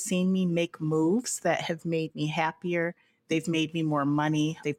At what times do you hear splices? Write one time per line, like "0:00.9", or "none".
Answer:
none